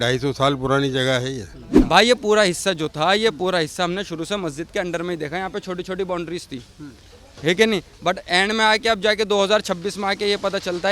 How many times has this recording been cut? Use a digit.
1